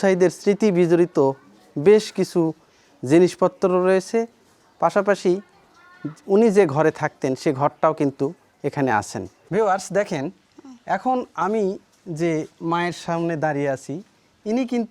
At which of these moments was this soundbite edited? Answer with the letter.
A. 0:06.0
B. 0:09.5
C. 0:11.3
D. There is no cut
B